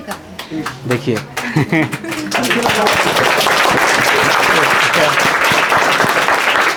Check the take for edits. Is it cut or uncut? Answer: uncut